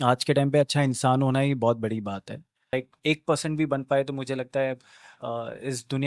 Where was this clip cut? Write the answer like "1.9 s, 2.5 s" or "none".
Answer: 2.7 s